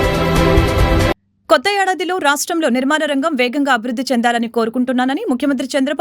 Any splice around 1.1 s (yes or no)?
yes